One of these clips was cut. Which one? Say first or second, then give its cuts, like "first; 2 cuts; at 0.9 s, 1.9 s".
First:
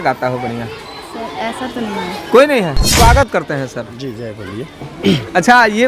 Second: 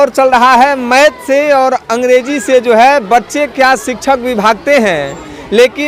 first; 1 cut; at 2.8 s